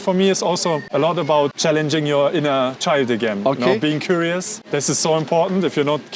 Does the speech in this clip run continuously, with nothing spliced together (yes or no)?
no